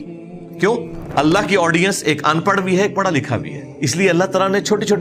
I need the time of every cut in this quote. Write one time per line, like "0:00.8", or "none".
0:01.0
0:03.6